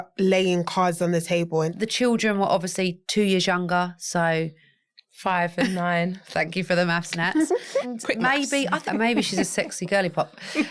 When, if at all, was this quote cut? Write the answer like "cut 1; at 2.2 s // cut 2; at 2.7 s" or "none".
cut 1; at 1.7 s // cut 2; at 7.9 s // cut 3; at 8.8 s